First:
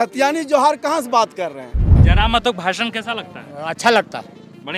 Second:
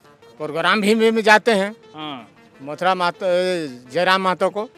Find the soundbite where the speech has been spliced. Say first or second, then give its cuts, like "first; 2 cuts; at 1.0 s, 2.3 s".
first; 1 cut; at 2.0 s